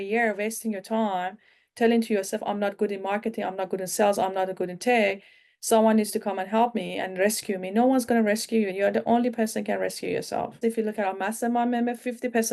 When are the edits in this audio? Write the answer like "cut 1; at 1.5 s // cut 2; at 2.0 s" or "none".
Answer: cut 1; at 8.7 s // cut 2; at 10.6 s